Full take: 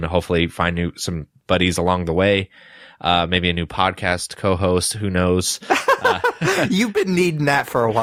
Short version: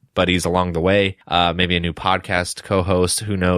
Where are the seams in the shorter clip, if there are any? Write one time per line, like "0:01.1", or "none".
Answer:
0:01.2